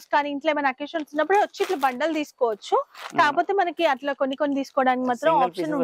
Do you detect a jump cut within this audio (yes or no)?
no